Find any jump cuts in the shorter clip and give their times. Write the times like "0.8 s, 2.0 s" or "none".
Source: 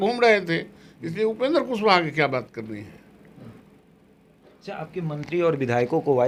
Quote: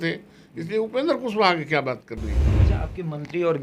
2.5 s